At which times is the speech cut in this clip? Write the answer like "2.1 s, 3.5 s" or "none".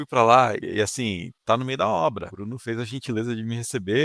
1.2 s, 2.3 s